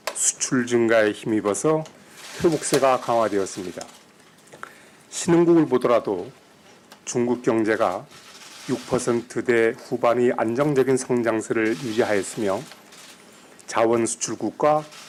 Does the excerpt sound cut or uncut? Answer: uncut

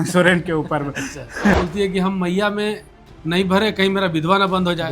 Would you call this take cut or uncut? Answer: cut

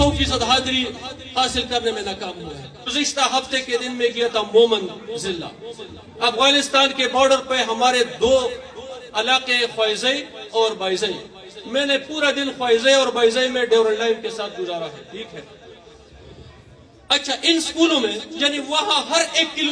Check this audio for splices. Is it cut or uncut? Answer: cut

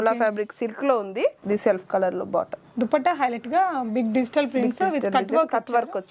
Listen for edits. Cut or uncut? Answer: uncut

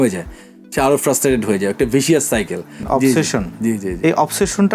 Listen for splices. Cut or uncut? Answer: cut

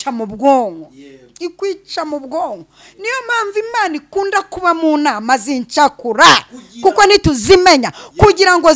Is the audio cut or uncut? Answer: uncut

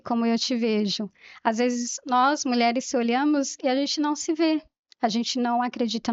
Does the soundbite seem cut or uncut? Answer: uncut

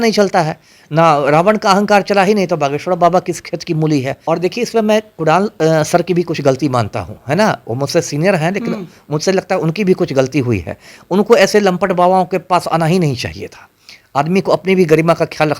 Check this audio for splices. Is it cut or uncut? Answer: cut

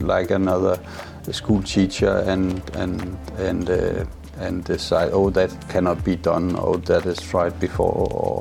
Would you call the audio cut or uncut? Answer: uncut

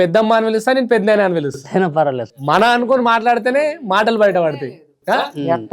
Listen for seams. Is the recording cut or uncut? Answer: uncut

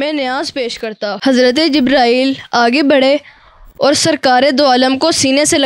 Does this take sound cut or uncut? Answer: cut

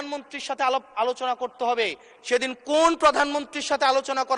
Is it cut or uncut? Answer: uncut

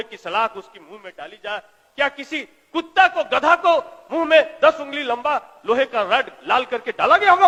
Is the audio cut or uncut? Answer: uncut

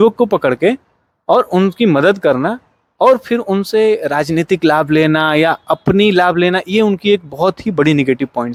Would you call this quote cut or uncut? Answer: uncut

